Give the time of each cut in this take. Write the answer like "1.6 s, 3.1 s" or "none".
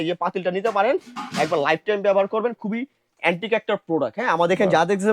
none